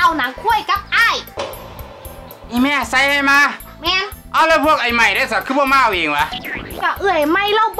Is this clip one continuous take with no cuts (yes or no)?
yes